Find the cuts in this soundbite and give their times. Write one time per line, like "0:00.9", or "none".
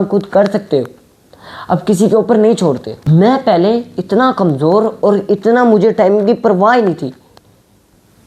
0:02.9